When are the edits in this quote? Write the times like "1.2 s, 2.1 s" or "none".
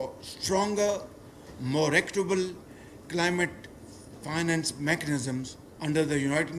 none